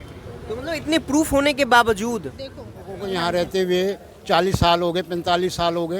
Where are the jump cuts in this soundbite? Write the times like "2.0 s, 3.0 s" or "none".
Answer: 3.0 s